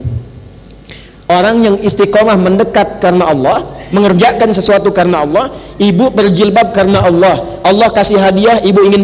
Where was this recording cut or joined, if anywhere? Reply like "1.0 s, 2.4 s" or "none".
1.1 s